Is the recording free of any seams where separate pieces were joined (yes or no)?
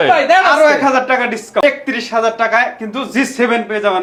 yes